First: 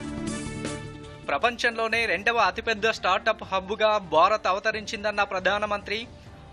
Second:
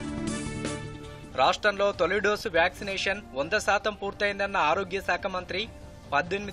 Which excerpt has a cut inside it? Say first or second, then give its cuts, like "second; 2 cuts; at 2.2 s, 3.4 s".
second; 1 cut; at 1.0 s